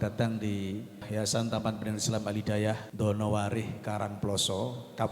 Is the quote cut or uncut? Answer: cut